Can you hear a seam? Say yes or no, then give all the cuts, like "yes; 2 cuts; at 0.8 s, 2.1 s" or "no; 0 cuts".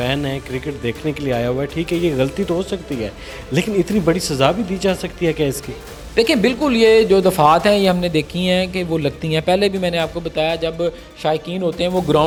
no; 0 cuts